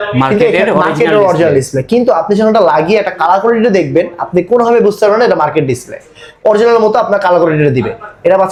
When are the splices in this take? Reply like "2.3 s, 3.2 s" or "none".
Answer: none